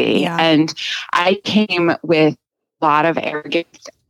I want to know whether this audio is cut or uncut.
uncut